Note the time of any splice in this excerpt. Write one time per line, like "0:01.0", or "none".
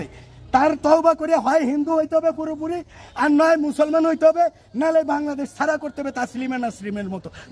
none